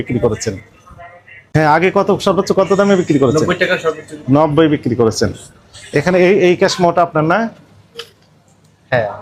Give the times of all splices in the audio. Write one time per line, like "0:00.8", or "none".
none